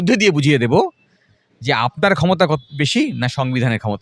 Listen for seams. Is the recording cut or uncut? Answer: uncut